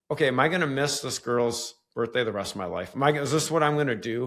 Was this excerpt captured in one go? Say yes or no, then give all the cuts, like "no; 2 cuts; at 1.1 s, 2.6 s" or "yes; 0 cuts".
yes; 0 cuts